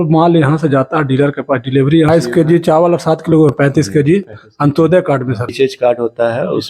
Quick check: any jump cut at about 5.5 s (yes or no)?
yes